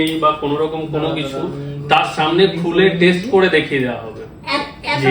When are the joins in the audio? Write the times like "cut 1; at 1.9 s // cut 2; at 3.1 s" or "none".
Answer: none